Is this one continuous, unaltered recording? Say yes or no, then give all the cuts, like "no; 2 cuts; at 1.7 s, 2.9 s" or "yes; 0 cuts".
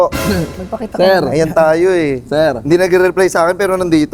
yes; 0 cuts